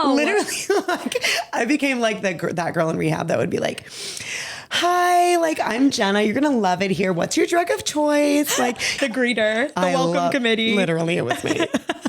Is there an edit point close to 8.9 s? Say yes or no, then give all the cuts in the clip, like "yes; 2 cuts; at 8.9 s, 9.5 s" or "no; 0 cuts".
yes; 1 cut; at 8.9 s